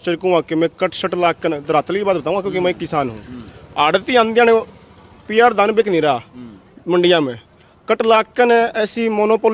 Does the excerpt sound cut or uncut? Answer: uncut